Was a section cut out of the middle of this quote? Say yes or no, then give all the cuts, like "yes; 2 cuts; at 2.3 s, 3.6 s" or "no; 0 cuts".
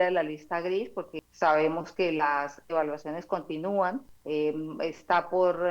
yes; 2 cuts; at 1.2 s, 4.1 s